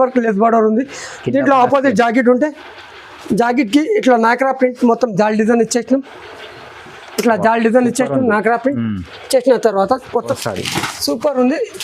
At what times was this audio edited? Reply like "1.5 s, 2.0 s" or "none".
10.4 s